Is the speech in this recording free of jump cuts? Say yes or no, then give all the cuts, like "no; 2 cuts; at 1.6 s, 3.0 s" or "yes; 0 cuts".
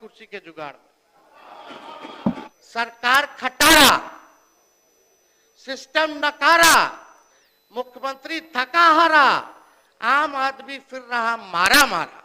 no; 1 cut; at 2.5 s